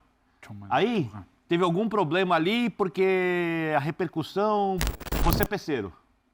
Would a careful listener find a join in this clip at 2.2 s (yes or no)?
no